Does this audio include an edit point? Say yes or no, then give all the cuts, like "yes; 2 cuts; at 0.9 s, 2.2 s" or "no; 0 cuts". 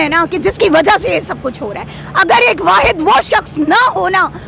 no; 0 cuts